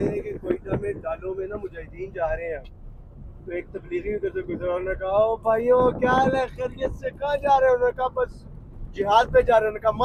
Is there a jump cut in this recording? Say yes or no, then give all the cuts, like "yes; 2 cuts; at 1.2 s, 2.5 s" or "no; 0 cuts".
no; 0 cuts